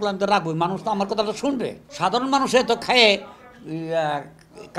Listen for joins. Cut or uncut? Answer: cut